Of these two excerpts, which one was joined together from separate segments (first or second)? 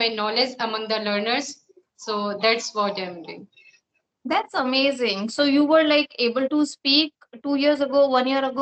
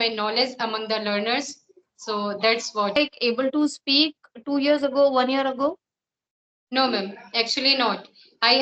second